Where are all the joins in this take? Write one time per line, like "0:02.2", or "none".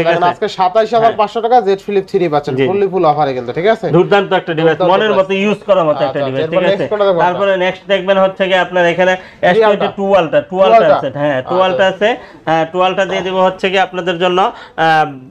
none